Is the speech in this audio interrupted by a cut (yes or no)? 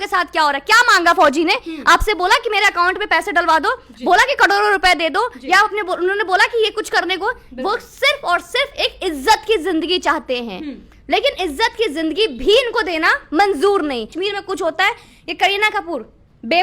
yes